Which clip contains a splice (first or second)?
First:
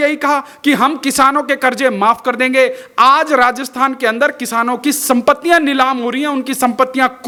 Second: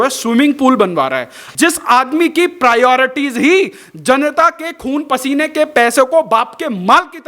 second